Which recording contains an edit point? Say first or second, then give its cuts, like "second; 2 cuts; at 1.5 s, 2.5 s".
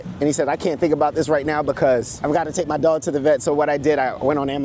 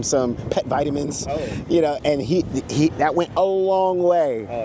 first; 1 cut; at 2.1 s